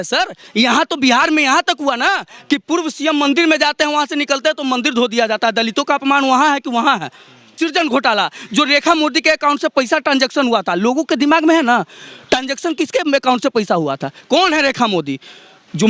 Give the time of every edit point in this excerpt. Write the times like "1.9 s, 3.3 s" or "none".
7.5 s